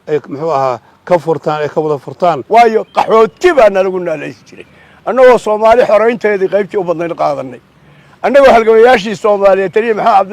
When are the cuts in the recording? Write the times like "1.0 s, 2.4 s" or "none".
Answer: 2.4 s